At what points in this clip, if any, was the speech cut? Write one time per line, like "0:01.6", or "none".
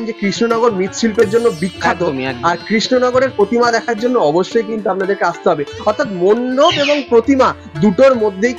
none